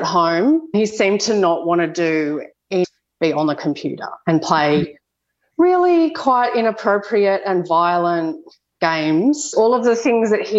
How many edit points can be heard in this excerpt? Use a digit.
3